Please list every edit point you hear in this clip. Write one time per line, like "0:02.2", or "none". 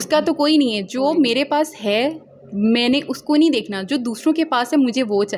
none